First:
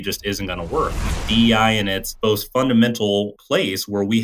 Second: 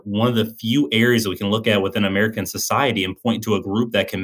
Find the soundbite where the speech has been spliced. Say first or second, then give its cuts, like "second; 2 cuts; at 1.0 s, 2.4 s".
first; 3 cuts; at 1.2 s, 2.0 s, 3.4 s